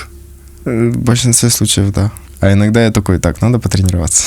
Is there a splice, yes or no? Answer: yes